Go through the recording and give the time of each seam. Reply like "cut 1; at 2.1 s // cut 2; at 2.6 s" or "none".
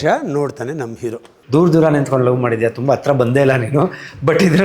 cut 1; at 1.3 s